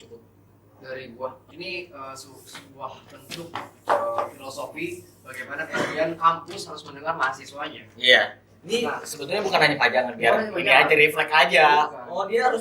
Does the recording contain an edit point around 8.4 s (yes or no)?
no